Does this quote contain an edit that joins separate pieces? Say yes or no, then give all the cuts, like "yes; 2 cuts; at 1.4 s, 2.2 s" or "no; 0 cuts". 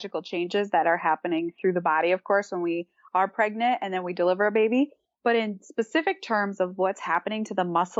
no; 0 cuts